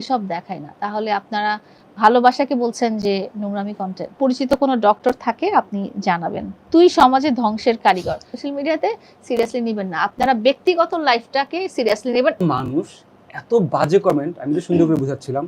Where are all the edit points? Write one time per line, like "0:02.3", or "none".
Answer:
0:04.2
0:06.5
0:08.3
0:12.4